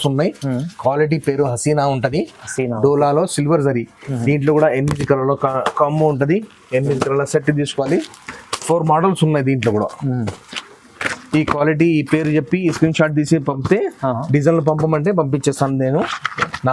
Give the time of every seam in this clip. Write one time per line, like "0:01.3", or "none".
none